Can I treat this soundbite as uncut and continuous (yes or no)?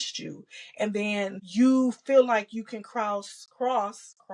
no